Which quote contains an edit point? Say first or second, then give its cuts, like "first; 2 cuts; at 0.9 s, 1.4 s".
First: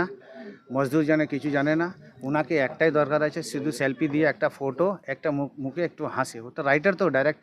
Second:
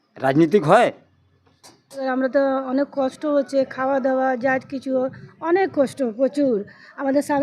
second; 1 cut; at 2.0 s